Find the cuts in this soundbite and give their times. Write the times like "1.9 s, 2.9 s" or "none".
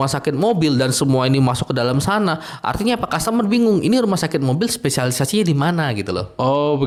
none